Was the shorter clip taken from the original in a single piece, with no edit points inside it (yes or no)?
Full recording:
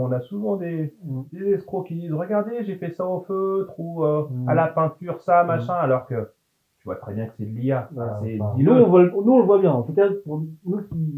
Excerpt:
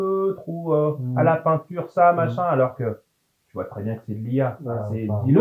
yes